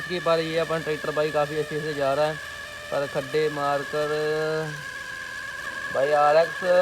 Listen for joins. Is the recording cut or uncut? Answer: uncut